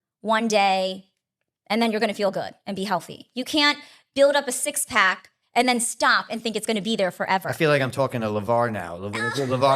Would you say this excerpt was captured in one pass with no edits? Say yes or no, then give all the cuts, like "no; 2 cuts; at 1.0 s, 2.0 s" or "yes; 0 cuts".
yes; 0 cuts